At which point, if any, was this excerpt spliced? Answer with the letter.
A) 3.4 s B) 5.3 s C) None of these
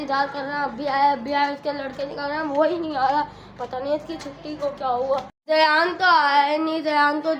B